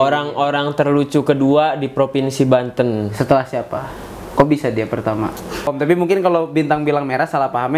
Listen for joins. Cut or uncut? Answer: cut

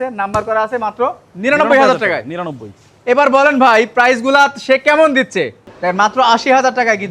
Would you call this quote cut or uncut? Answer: cut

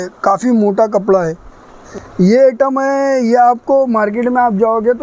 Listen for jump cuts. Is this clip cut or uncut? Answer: cut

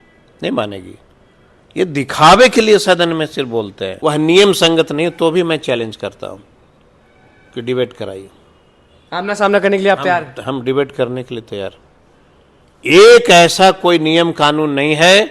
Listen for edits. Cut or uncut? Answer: cut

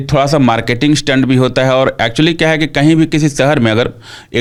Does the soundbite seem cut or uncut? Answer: uncut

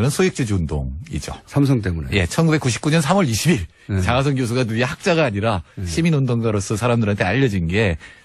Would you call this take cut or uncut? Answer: cut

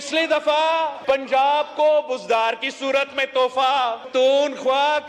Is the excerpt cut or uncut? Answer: cut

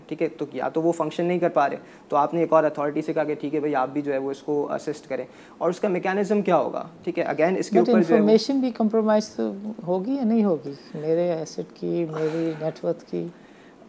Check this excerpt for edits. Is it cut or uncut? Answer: uncut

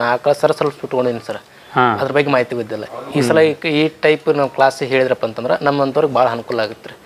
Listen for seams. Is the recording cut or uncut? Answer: uncut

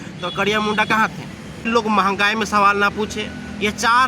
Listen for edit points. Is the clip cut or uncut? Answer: cut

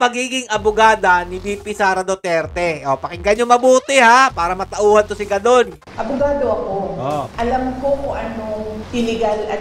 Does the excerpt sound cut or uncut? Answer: cut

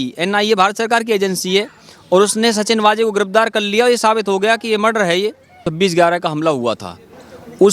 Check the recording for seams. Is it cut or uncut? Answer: cut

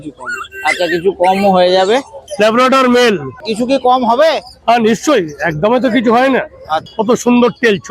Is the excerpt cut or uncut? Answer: cut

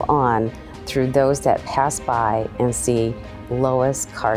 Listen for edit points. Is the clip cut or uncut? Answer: uncut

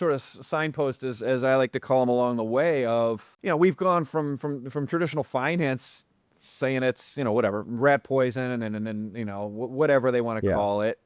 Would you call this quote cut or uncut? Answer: cut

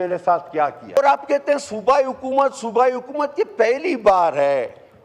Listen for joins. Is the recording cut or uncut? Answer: cut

